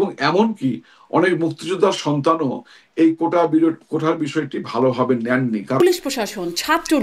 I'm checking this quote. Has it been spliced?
no; 0 cuts

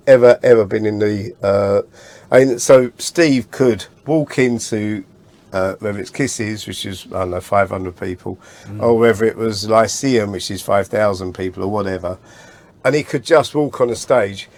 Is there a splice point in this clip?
no; 0 cuts

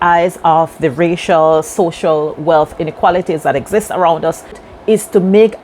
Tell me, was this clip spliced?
yes; 1 cut; at 4.6 s

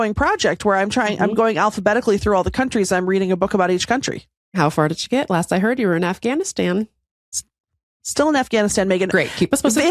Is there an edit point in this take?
no; 0 cuts

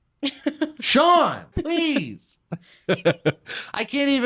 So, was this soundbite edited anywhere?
yes; 1 cut; at 1.4 s

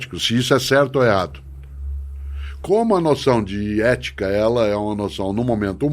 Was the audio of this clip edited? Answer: no; 0 cuts

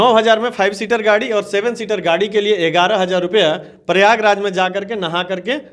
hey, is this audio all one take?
yes; 0 cuts

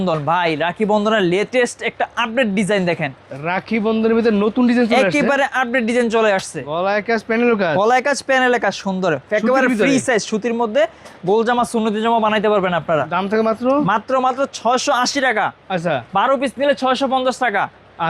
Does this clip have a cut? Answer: no; 0 cuts

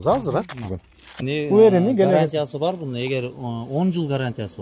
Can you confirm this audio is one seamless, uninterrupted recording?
no; 1 cut; at 1.2 s

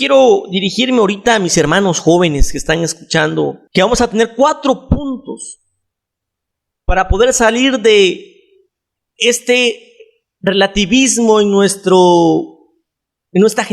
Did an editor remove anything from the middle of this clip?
yes; 1 cut; at 3.6 s

